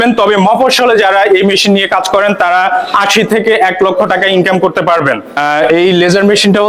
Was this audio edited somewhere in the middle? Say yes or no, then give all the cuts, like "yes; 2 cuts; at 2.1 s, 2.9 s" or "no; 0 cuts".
yes; 1 cut; at 5.3 s